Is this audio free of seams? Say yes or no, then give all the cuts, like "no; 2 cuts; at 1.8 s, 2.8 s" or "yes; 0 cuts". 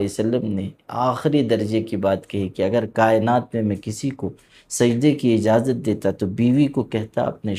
yes; 0 cuts